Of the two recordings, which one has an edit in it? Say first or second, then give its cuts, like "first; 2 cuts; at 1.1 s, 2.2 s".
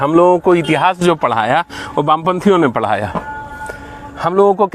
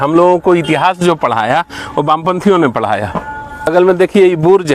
second; 1 cut; at 3.7 s